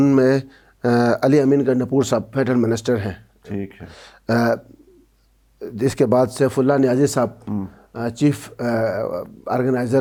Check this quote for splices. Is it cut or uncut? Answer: uncut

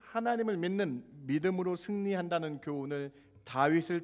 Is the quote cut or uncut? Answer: uncut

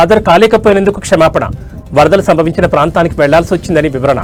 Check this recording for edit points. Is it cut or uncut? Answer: uncut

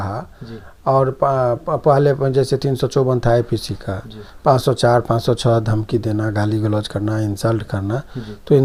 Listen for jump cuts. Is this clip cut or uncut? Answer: uncut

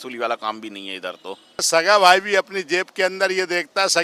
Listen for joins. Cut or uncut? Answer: cut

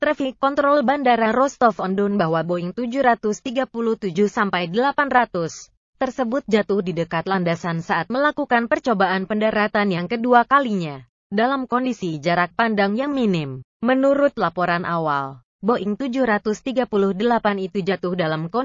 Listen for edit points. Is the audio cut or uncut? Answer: cut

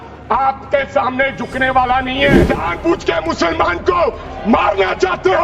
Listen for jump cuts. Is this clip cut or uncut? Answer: cut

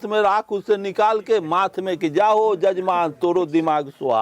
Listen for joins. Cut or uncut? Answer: uncut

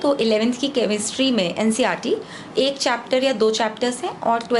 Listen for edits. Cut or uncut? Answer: uncut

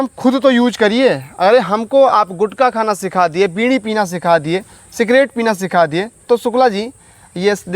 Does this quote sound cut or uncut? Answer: uncut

